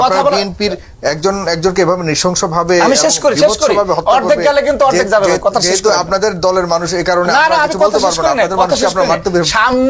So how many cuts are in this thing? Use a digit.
0